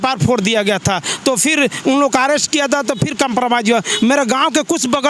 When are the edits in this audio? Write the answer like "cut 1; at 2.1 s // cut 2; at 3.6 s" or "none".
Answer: none